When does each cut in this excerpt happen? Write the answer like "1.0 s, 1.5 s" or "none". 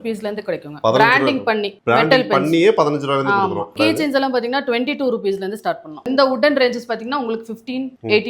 3.7 s, 6.0 s